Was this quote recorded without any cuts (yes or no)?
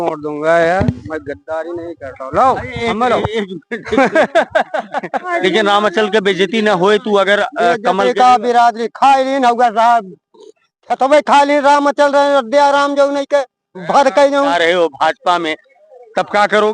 no